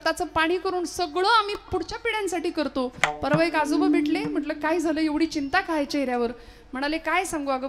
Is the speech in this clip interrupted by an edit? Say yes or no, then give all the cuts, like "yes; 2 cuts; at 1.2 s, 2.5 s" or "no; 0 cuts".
no; 0 cuts